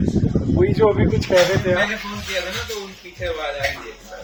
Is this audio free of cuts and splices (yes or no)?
yes